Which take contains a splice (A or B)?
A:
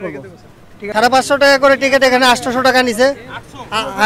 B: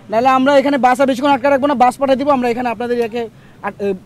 A